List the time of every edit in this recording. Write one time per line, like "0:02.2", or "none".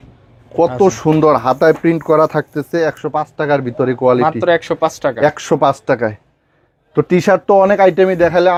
none

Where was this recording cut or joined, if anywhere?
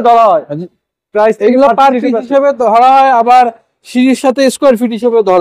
none

